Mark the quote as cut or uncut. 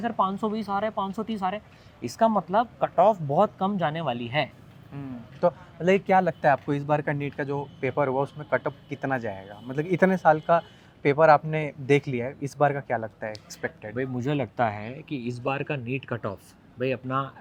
uncut